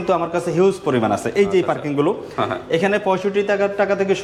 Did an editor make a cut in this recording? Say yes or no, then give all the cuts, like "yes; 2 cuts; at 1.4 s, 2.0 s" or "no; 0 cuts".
no; 0 cuts